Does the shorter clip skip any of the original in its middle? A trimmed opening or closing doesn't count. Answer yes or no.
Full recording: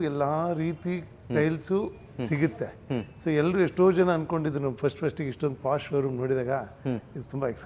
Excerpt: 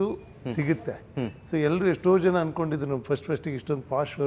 no